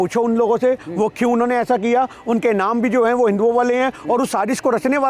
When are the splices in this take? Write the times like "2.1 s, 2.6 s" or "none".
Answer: none